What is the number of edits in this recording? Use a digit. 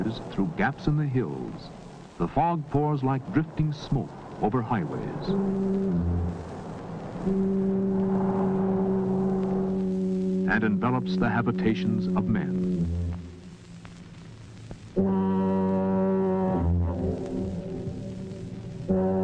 1